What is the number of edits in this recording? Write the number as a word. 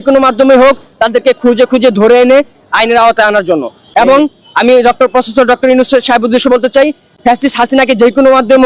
zero